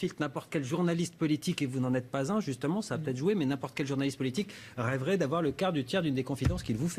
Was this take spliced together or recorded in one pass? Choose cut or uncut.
cut